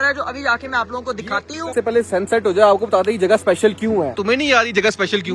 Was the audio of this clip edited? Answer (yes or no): yes